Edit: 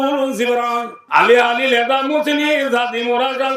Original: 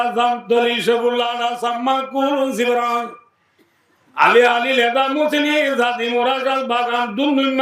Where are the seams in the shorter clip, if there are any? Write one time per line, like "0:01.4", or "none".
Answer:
0:01.0